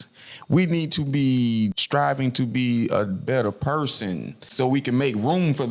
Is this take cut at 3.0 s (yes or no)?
no